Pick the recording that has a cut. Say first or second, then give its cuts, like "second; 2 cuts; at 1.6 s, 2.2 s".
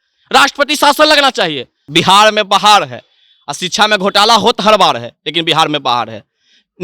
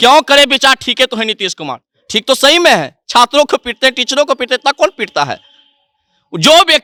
first; 1 cut; at 1.9 s